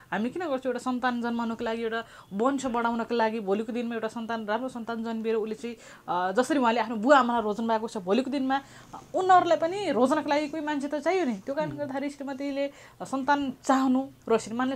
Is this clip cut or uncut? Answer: uncut